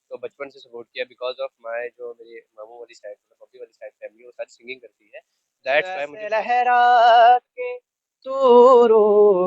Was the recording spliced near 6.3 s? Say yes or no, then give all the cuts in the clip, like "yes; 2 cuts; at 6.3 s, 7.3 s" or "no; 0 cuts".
yes; 1 cut; at 6.3 s